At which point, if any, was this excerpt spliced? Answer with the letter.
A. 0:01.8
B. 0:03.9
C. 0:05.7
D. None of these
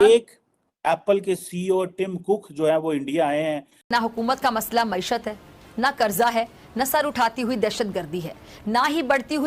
B